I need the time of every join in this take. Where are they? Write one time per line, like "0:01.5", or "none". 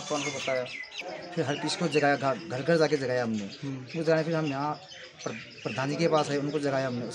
0:00.9